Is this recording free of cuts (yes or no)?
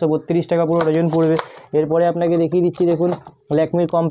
yes